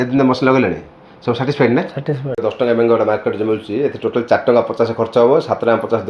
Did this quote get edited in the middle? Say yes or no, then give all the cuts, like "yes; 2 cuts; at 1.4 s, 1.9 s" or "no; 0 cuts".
yes; 1 cut; at 2.4 s